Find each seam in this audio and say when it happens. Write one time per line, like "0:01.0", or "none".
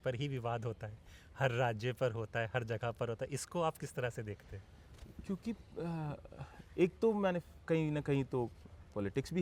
none